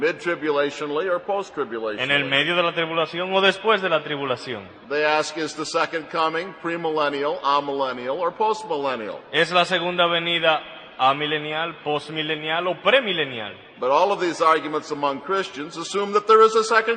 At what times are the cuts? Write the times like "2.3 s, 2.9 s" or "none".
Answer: 12.1 s